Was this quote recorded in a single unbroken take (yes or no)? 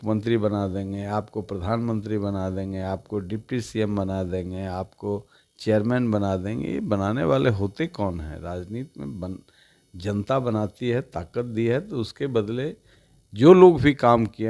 yes